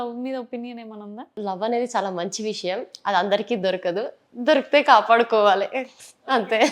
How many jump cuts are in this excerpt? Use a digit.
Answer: 1